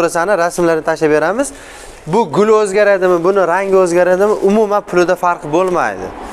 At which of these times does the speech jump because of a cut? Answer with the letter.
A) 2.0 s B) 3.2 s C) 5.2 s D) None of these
D